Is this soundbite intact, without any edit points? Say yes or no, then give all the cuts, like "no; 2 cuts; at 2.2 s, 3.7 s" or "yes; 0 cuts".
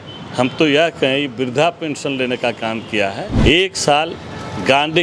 no; 1 cut; at 3.3 s